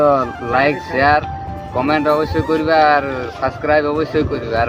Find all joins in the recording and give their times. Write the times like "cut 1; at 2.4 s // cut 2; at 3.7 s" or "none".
none